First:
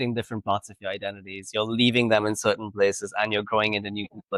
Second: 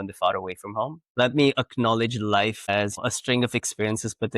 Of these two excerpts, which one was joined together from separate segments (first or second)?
second